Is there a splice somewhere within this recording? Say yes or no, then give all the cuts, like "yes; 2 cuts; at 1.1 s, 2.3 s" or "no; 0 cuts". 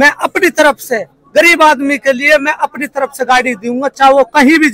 no; 0 cuts